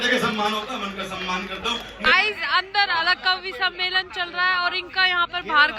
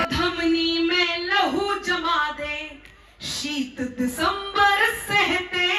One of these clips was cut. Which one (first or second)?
first